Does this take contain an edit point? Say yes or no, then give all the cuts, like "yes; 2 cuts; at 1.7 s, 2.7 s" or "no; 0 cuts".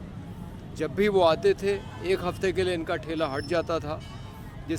no; 0 cuts